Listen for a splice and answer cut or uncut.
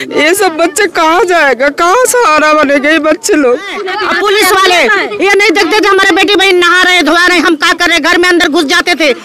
cut